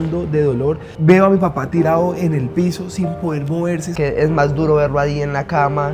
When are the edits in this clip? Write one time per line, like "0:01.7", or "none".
0:00.9
0:03.9

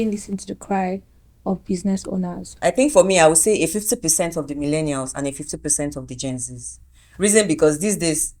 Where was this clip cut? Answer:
0:02.6

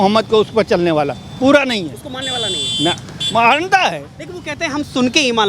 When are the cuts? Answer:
none

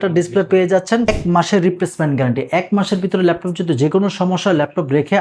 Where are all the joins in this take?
0:01.1

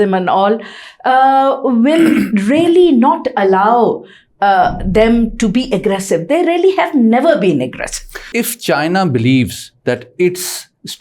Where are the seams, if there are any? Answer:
0:08.3

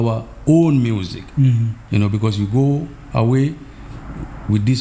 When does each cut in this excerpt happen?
0:01.8

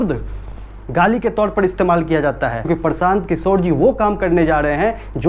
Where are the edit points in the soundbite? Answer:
0:02.6

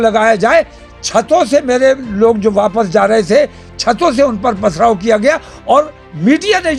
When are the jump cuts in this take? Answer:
none

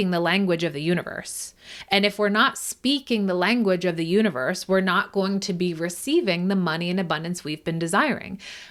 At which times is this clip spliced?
none

